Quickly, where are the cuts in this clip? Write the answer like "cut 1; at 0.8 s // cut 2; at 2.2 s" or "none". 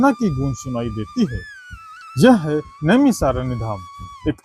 none